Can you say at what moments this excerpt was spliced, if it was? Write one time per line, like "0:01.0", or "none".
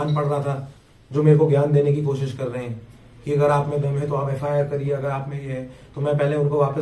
none